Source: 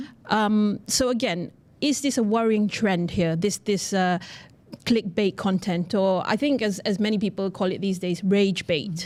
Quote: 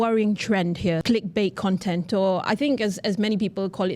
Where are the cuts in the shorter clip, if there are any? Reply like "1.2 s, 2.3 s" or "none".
1.0 s

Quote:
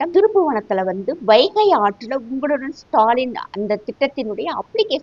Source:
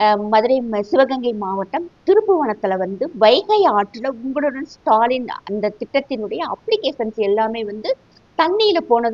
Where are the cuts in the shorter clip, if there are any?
none

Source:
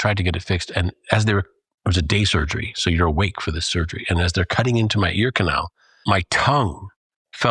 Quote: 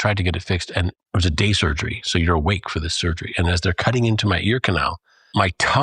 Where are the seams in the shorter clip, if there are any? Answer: 1.0 s

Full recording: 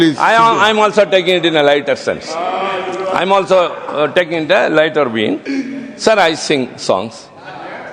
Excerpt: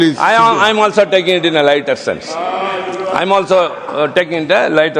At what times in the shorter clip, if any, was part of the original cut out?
none

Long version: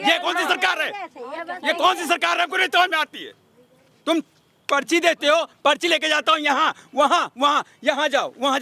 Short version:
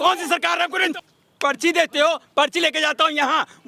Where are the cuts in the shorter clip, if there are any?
0.9 s

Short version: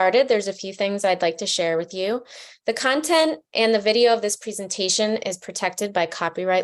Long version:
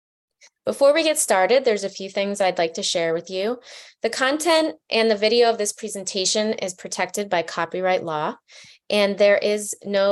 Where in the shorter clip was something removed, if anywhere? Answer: none

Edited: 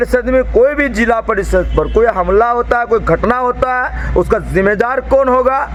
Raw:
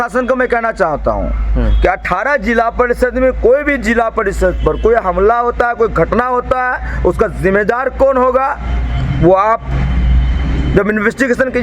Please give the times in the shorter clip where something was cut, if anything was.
none

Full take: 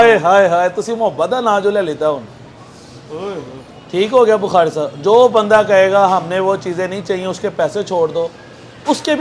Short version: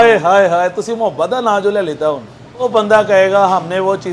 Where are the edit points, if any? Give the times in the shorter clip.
2.7 s

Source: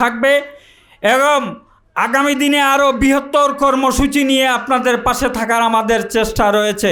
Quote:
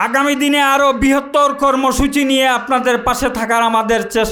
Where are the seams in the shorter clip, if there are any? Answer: none

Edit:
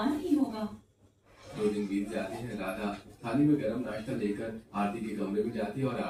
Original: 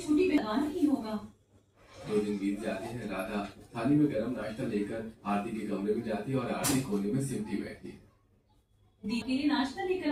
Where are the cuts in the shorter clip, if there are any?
none

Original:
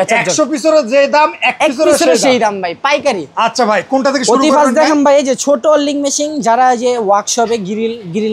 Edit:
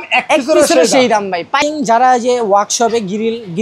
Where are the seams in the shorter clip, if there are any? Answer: 1.6 s

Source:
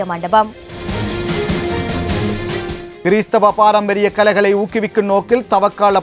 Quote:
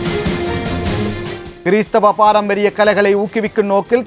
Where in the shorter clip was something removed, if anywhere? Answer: 1.4 s

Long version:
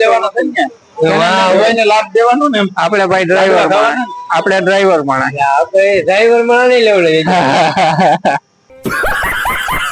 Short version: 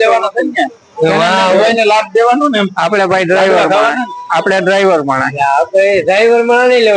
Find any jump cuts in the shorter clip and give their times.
none

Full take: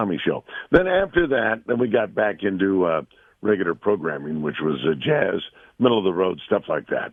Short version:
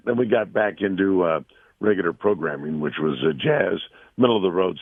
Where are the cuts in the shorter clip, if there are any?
none

